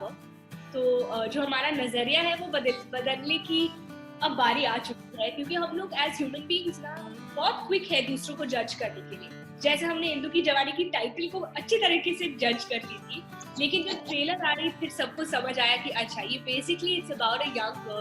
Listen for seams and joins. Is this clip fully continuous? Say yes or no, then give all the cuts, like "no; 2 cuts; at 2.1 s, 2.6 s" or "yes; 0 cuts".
yes; 0 cuts